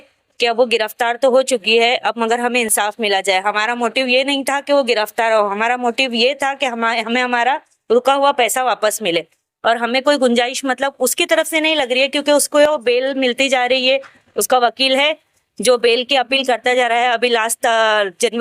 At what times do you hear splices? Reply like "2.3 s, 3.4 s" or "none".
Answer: none